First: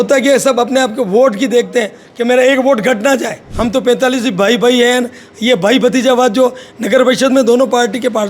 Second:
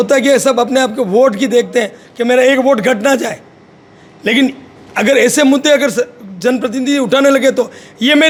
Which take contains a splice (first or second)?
first